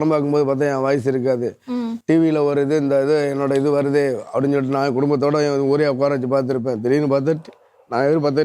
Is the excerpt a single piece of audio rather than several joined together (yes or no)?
yes